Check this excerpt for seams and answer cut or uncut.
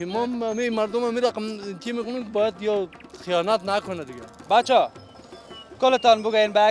cut